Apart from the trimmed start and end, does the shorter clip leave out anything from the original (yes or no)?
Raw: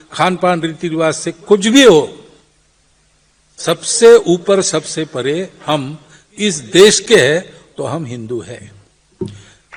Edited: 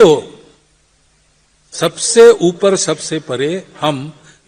no